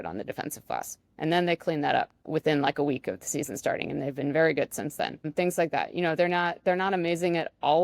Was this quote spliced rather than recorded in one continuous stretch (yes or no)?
yes